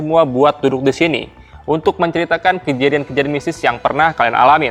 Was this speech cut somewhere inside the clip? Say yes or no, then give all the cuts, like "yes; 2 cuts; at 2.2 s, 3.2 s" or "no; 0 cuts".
no; 0 cuts